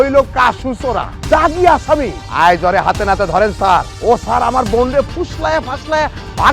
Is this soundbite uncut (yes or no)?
no